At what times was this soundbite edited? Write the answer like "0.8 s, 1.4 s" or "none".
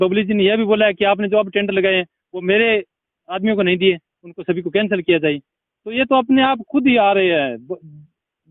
none